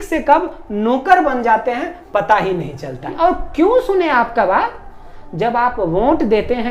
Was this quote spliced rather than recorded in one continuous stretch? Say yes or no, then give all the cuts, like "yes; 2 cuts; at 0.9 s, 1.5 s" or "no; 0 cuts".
yes; 1 cut; at 3.1 s